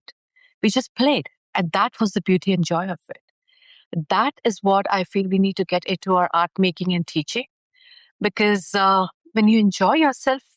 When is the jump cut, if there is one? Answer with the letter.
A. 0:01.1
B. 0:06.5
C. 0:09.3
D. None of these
D